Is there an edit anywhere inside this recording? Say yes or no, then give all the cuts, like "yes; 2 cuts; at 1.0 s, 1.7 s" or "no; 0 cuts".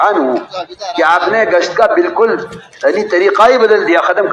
no; 0 cuts